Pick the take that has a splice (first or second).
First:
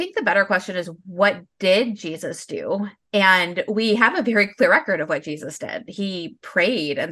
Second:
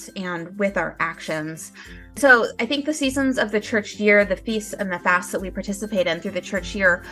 second